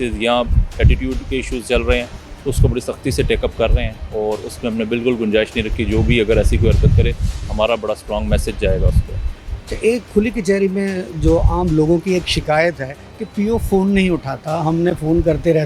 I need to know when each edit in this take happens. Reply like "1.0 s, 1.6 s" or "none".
none